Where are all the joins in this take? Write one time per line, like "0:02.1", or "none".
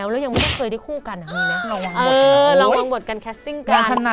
0:01.8